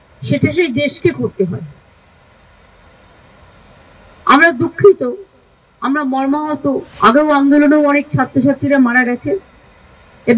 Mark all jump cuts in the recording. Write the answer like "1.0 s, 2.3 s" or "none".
6.9 s